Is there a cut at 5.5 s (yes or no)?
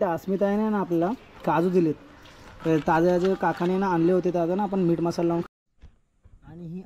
yes